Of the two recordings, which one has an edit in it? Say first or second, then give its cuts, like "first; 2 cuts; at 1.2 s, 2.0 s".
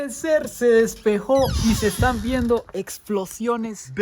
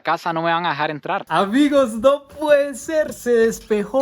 second; 1 cut; at 1.2 s